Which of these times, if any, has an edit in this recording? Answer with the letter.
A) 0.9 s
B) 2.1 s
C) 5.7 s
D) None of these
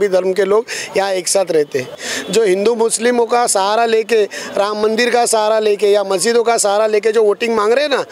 B